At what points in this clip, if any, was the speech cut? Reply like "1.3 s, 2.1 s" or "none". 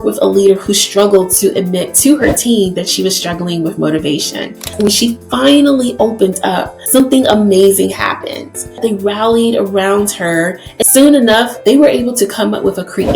4.7 s, 7.0 s, 9.0 s, 10.7 s, 11.7 s